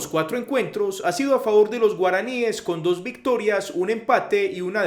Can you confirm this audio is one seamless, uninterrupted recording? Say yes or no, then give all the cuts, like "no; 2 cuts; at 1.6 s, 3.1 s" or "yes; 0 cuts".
yes; 0 cuts